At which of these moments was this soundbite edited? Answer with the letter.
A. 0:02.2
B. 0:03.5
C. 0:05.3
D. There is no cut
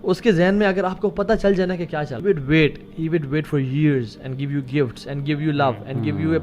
A